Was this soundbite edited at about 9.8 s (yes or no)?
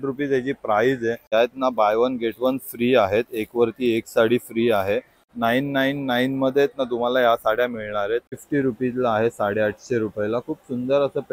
no